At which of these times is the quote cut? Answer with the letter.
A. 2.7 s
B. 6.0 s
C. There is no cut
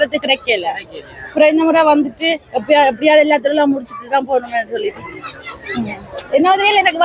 C